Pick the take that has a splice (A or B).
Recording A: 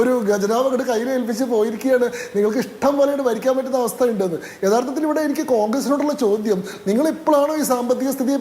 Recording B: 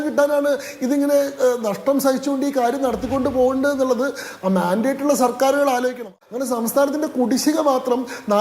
B